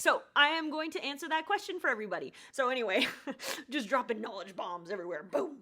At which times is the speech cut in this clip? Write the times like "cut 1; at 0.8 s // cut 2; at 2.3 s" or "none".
cut 1; at 2.4 s